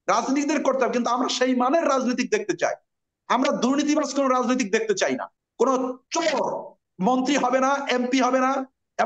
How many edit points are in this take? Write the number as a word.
two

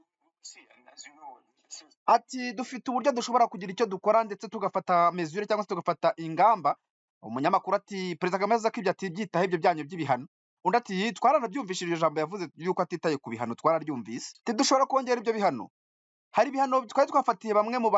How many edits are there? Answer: one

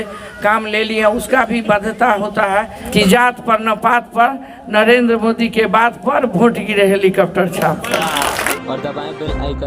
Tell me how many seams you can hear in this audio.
two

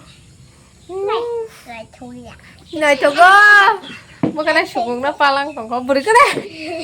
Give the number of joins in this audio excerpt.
zero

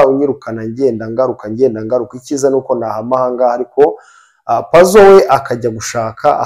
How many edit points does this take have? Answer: zero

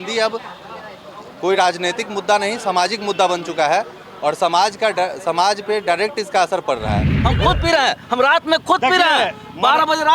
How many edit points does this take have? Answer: one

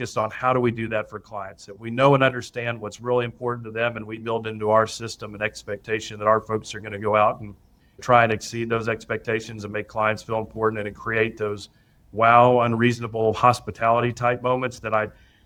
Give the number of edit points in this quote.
zero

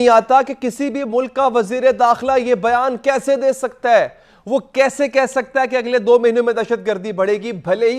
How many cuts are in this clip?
zero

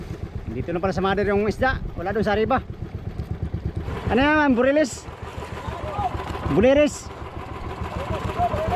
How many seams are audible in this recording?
one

